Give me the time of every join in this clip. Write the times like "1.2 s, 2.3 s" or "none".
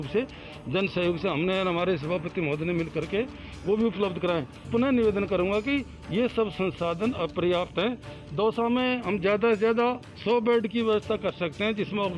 4.7 s